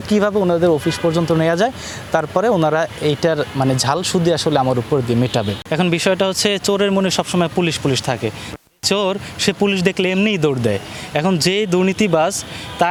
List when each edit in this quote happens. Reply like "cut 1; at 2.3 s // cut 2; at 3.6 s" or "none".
none